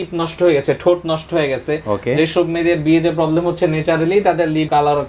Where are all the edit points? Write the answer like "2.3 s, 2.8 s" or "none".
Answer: none